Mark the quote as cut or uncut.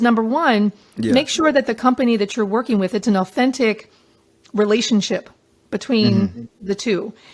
uncut